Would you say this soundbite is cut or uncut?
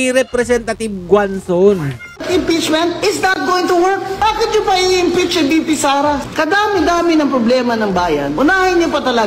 cut